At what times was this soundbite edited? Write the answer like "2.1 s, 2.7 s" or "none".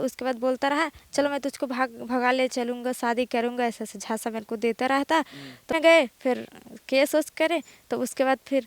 5.7 s